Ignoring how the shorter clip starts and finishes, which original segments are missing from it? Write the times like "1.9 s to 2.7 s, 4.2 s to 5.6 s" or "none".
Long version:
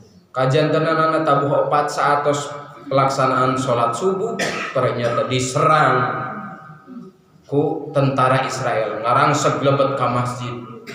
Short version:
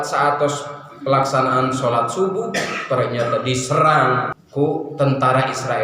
6.2 s to 7.3 s